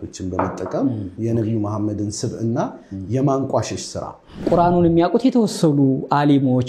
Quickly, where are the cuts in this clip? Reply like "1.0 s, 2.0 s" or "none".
1.1 s, 4.5 s

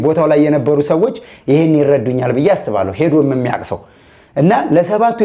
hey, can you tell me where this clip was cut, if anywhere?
none

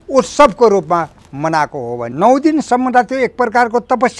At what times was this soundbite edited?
2.1 s

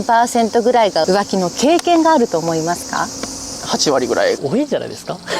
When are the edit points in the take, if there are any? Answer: 4.4 s

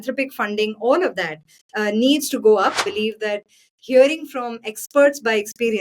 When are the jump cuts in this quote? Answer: 2.8 s

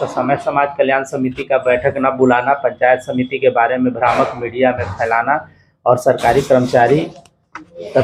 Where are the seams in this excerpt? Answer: none

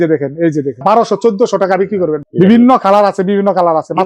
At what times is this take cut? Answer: 2.2 s

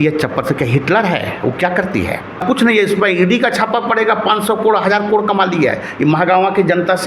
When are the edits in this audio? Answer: 2.4 s

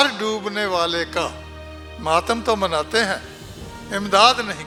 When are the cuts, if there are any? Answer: none

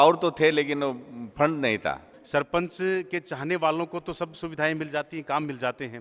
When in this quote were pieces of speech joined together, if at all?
2.1 s

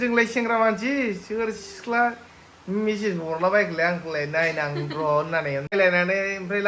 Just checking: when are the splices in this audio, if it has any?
5.7 s

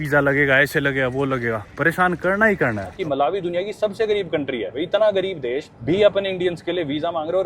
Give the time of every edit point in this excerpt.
2.9 s, 4.7 s, 5.7 s

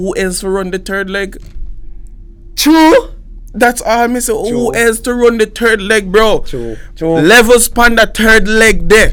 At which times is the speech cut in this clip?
none

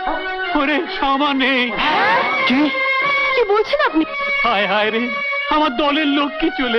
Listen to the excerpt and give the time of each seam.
none

